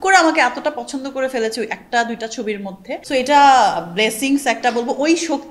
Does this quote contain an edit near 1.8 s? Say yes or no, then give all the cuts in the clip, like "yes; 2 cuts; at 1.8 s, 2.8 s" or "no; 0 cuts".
no; 1 cut; at 3.0 s